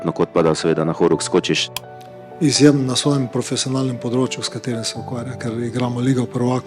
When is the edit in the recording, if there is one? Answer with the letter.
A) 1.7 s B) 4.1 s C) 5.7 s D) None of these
A